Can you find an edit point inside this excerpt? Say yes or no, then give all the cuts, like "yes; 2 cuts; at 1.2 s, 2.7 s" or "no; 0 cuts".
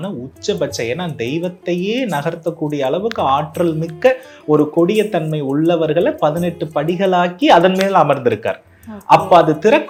no; 0 cuts